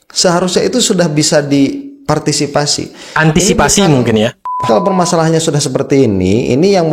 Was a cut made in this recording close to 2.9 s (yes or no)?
no